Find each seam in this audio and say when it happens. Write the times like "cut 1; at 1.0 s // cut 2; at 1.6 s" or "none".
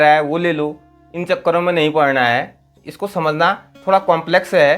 cut 1; at 2.8 s